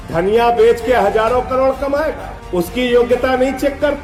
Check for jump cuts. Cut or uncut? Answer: uncut